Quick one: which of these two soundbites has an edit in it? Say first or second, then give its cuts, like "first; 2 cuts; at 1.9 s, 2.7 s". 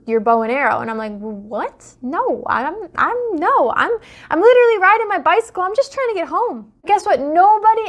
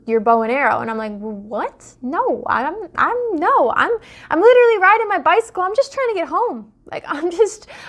first; 1 cut; at 6.7 s